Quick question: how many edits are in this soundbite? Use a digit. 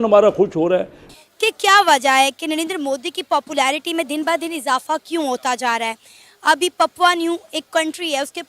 1